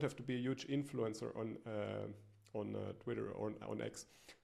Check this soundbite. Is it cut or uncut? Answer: uncut